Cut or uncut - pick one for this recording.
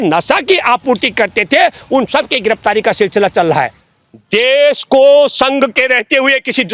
cut